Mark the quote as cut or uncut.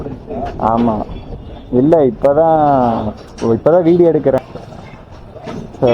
cut